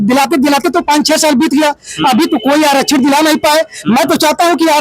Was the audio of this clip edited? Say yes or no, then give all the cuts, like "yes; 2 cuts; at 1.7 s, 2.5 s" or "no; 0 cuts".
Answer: no; 0 cuts